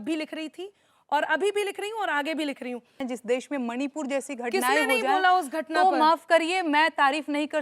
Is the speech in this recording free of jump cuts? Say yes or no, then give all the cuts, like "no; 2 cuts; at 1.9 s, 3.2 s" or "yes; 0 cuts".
no; 1 cut; at 3.0 s